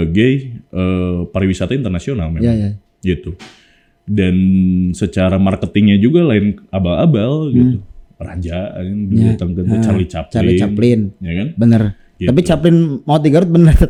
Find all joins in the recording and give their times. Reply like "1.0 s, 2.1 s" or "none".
none